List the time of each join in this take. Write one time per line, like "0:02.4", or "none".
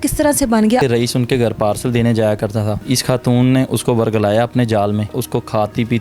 0:00.8
0:02.8
0:05.2